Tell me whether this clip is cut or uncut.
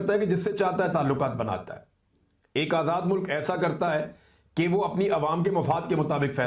uncut